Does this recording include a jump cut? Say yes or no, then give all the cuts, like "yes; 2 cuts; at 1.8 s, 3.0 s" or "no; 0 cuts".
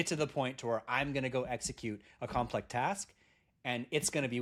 no; 0 cuts